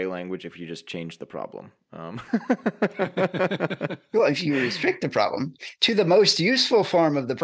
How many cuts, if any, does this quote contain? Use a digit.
0